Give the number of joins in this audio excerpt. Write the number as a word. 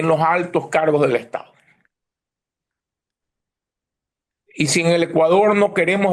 zero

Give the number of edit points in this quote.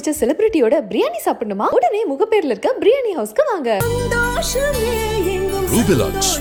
zero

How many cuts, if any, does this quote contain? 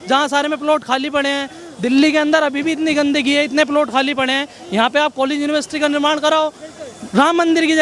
zero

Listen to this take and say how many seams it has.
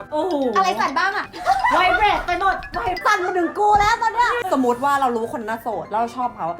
one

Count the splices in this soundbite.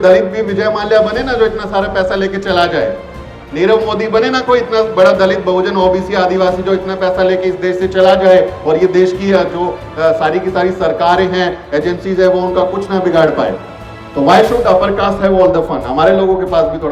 zero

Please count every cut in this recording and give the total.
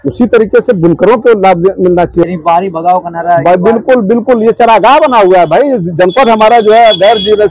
one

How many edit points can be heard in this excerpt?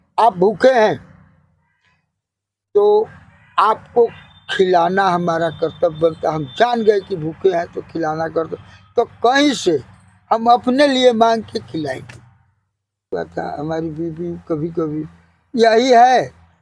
one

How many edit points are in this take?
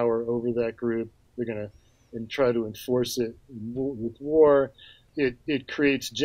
one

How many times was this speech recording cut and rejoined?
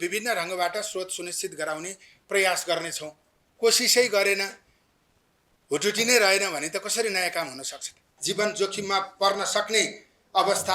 one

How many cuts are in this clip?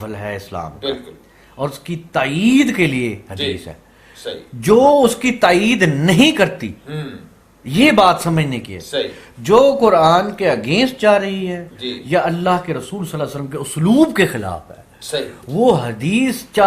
zero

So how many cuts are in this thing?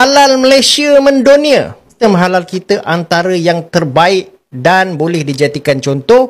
one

